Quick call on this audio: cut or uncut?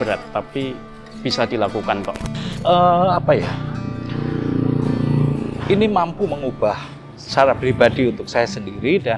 cut